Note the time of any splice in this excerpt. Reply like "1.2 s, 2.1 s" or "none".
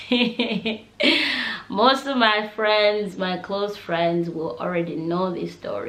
none